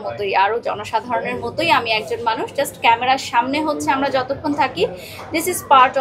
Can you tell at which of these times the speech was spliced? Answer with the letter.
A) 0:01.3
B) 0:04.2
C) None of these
C